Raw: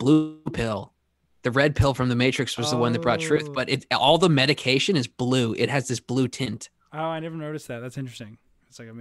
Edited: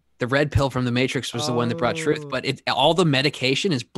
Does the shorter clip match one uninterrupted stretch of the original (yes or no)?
yes